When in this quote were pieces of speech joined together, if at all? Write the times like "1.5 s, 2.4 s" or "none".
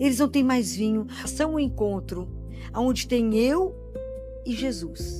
1.3 s